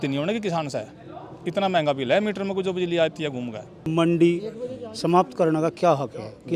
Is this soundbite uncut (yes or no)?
no